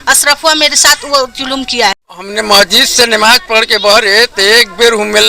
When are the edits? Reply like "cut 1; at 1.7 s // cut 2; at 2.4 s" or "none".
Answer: cut 1; at 2.4 s